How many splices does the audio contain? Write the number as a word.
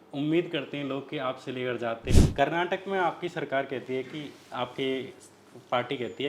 one